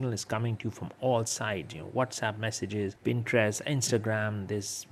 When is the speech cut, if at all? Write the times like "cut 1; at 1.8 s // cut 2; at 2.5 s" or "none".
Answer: none